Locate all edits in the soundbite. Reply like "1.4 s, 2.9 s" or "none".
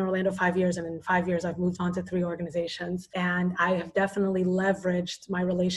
3.1 s